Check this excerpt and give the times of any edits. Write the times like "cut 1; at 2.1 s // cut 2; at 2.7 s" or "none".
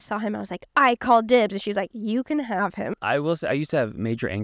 cut 1; at 2.9 s